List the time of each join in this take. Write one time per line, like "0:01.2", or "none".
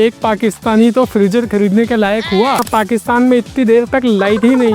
0:02.6